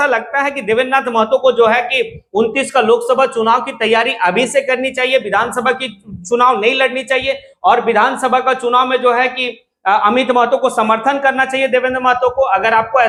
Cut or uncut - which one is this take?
uncut